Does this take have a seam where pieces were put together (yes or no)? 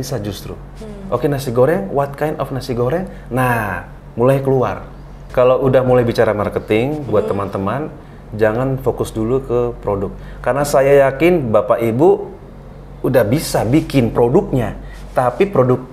yes